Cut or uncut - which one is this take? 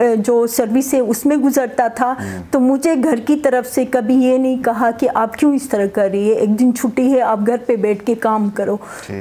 uncut